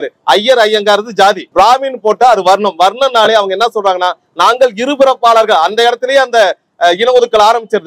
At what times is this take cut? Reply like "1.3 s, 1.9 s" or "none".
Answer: none